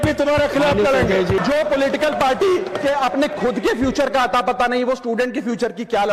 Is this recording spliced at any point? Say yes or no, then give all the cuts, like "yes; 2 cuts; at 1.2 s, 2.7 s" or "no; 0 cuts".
no; 0 cuts